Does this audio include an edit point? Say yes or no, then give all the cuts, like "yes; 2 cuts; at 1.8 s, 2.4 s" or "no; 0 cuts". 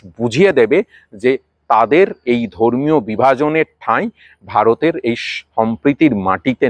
no; 0 cuts